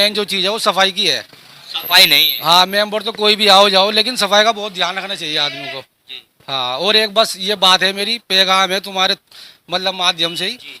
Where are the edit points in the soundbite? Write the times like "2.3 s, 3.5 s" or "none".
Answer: none